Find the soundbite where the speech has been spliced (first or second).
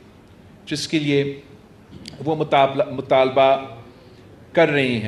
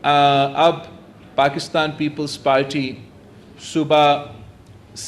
second